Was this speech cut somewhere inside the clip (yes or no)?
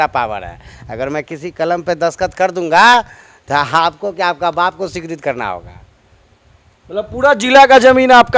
no